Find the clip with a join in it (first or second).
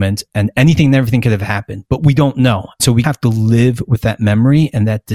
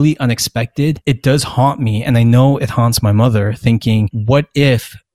second